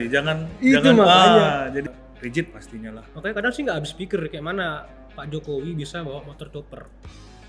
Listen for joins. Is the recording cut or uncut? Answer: cut